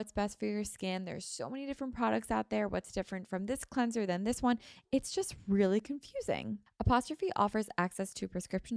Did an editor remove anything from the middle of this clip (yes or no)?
yes